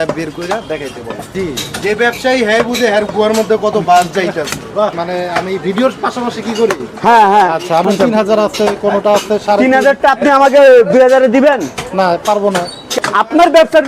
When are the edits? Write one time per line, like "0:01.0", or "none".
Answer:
0:01.3
0:04.9
0:07.8
0:12.9

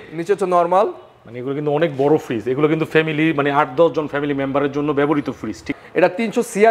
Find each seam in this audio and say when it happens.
0:05.7

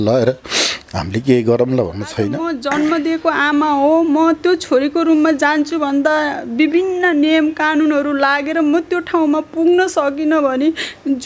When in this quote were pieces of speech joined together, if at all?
0:02.4

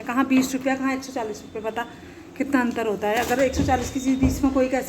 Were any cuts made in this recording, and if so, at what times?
none

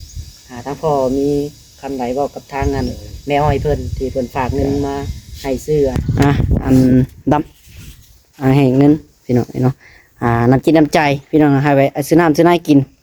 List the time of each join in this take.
0:06.0

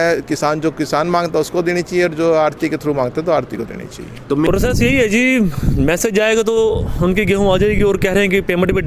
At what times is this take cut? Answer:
0:04.5

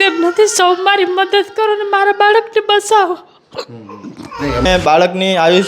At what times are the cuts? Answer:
0:04.7

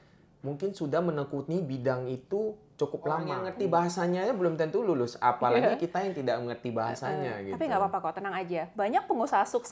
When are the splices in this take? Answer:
0:03.4

